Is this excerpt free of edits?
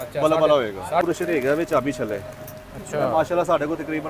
no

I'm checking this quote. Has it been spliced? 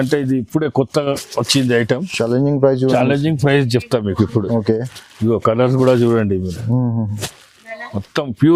no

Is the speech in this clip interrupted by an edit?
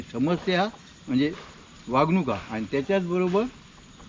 no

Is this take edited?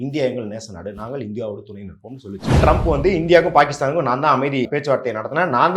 yes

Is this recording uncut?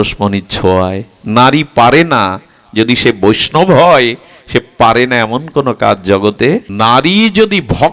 no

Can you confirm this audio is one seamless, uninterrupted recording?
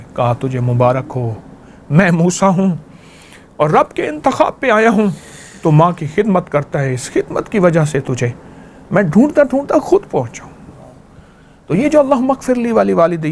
yes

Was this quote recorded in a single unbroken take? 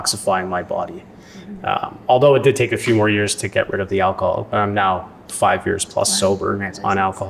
yes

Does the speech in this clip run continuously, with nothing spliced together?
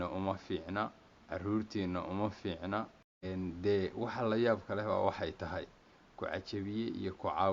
no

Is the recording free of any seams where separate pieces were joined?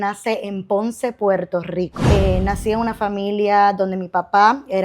no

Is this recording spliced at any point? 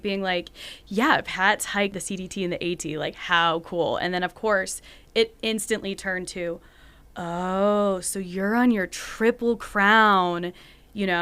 yes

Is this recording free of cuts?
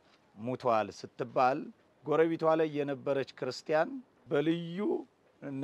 no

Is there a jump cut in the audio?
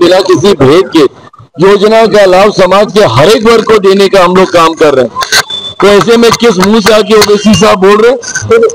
no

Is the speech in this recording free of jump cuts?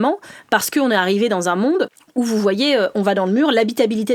yes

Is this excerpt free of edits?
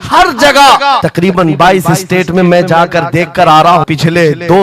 no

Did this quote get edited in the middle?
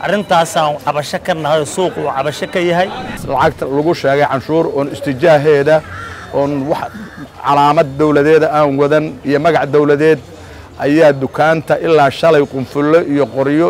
yes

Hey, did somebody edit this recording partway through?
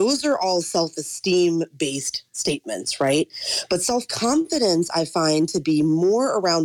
no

